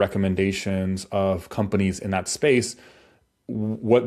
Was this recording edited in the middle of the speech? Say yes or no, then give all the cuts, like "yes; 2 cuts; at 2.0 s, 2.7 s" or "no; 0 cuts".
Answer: no; 0 cuts